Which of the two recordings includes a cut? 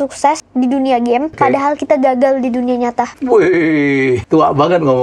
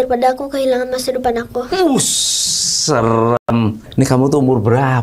first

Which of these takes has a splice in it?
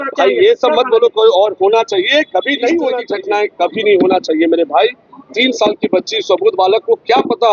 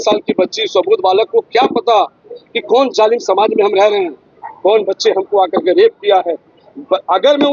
first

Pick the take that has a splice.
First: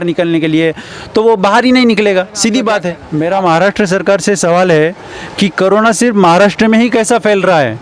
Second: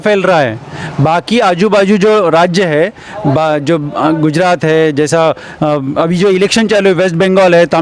first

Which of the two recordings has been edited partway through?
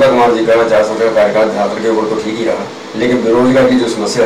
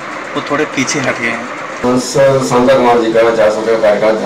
second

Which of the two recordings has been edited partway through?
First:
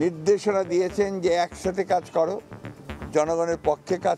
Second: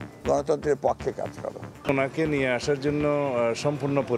second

